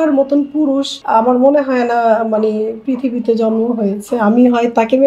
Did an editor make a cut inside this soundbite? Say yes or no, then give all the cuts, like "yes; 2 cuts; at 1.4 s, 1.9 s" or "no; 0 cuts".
yes; 1 cut; at 0.9 s